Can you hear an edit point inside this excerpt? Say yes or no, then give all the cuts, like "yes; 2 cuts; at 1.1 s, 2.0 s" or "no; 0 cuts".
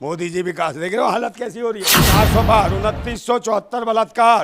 yes; 1 cut; at 2.0 s